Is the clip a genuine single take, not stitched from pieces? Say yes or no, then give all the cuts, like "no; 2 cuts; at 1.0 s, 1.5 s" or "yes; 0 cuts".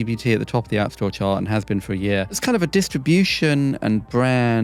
no; 1 cut; at 2.4 s